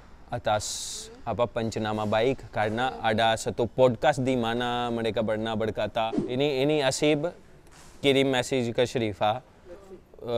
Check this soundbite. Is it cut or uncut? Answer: cut